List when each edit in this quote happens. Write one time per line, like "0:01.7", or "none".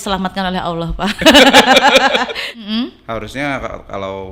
0:02.4